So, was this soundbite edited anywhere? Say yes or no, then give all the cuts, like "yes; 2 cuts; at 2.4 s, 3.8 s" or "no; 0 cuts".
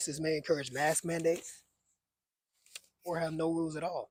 no; 0 cuts